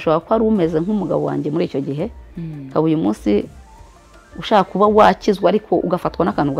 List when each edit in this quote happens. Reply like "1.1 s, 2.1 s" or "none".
none